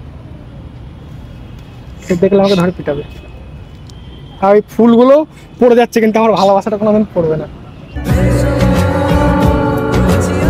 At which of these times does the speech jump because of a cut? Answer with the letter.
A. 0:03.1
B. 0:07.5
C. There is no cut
C